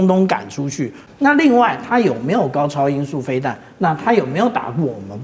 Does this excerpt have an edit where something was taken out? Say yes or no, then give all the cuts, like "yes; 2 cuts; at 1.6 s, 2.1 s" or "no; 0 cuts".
yes; 1 cut; at 1.0 s